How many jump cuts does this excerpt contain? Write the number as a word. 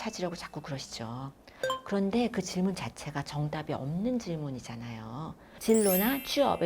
one